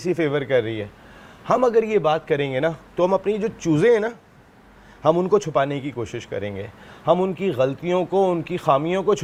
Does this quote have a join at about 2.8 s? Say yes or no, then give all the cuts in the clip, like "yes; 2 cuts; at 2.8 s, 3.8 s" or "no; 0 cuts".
no; 0 cuts